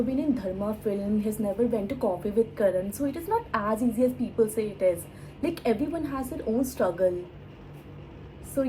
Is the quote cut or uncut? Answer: uncut